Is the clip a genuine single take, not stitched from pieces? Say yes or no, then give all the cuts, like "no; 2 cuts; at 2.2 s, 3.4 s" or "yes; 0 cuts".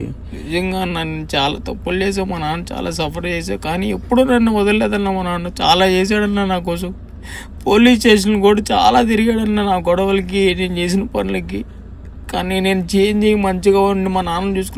yes; 0 cuts